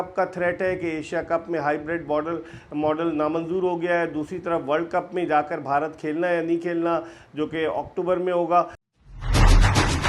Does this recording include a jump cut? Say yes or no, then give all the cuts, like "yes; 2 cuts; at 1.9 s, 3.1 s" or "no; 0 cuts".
yes; 1 cut; at 8.8 s